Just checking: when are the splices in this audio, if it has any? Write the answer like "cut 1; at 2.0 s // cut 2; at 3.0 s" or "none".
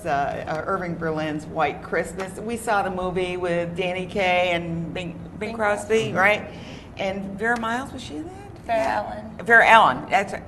cut 1; at 5.9 s